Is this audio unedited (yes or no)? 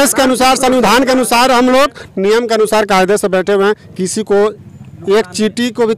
yes